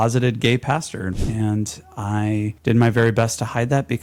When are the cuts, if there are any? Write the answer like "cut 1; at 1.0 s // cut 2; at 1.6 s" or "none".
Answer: cut 1; at 1.2 s // cut 2; at 2.6 s